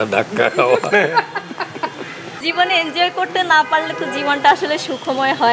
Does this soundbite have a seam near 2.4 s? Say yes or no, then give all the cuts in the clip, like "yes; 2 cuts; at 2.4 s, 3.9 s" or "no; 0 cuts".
yes; 1 cut; at 2.4 s